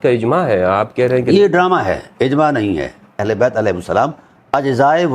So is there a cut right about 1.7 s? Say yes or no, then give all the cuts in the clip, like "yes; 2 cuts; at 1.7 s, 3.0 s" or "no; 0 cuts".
no; 1 cut; at 3.2 s